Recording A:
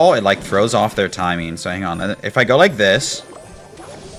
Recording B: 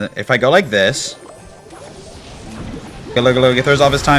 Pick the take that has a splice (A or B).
B